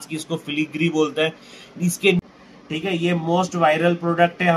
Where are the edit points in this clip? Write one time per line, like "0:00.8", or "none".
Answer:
0:02.2